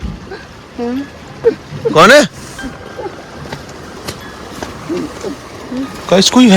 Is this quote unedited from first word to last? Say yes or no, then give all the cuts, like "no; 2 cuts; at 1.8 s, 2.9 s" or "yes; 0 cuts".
yes; 0 cuts